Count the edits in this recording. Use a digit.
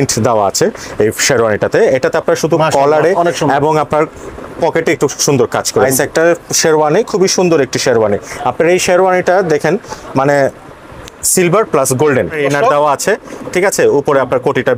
2